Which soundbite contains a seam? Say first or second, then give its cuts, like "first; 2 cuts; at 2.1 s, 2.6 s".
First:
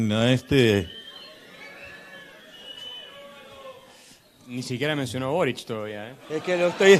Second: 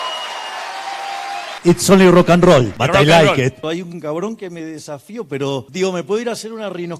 second; 4 cuts; at 1.5 s, 2.8 s, 3.6 s, 5.7 s